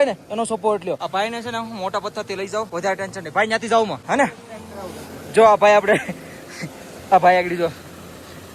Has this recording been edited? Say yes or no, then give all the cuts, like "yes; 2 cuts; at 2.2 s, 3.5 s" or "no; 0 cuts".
yes; 3 cuts; at 1.0 s, 2.7 s, 4.0 s